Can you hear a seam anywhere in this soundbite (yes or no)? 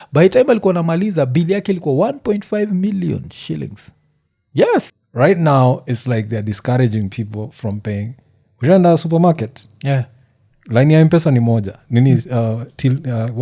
yes